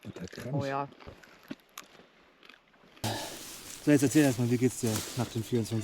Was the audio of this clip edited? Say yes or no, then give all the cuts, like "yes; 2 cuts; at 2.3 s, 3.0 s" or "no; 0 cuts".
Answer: yes; 2 cuts; at 1.1 s, 3.0 s